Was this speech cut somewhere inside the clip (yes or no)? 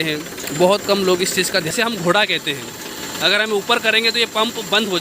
yes